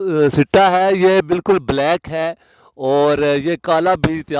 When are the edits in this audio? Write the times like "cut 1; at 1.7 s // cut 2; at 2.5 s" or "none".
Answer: none

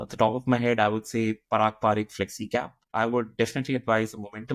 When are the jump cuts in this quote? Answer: cut 1; at 2.9 s

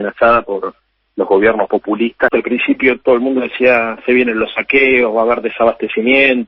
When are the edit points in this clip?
cut 1; at 2.3 s

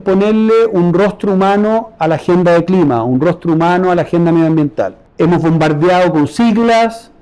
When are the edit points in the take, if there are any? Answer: cut 1; at 5.0 s

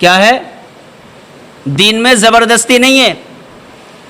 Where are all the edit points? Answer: none

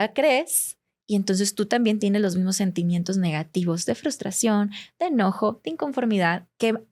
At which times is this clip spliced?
none

